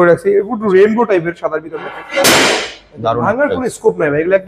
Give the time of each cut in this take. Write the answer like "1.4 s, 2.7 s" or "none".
2.0 s